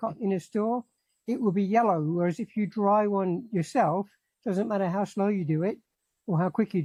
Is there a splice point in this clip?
no; 0 cuts

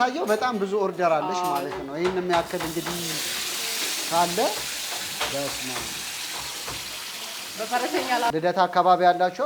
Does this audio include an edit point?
yes; 1 cut; at 8.3 s

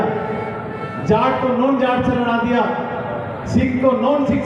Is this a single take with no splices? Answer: yes; 0 cuts

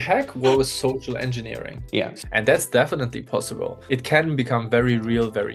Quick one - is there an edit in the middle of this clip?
yes; 2 cuts; at 2.1 s, 3.8 s

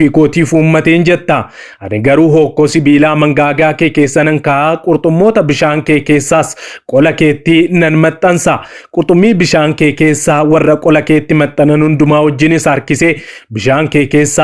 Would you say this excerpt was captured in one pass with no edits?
yes; 0 cuts

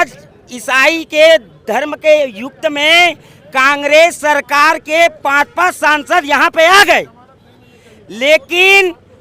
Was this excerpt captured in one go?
yes; 0 cuts

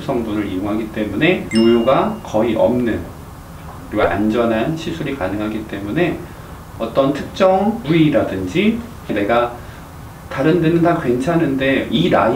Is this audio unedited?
yes; 0 cuts

